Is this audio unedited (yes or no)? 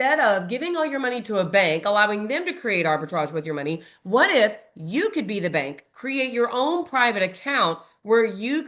yes